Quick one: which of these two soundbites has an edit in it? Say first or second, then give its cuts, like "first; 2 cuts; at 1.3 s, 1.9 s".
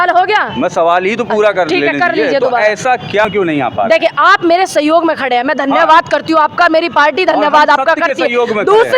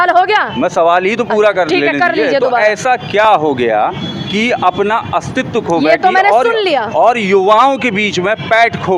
first; 1 cut; at 3.2 s